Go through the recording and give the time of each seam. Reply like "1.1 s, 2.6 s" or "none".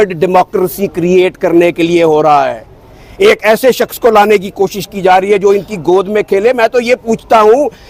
none